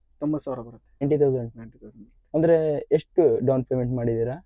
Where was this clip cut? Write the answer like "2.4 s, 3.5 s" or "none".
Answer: 1.0 s